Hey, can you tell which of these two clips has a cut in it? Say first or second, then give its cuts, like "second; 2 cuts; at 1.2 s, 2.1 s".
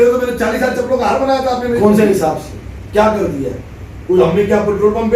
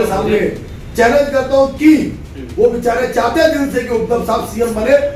first; 1 cut; at 1.7 s